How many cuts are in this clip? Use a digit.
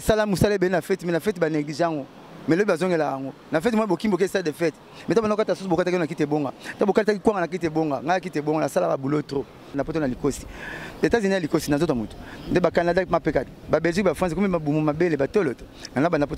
1